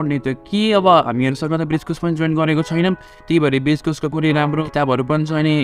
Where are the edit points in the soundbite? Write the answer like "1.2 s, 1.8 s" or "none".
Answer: 4.6 s